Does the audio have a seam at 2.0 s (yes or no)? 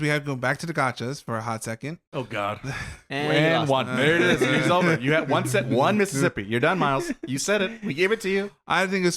yes